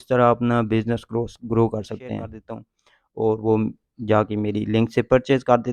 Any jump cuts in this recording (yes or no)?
yes